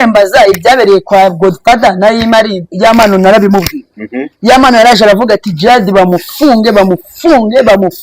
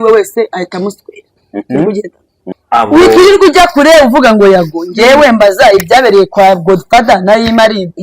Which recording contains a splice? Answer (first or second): second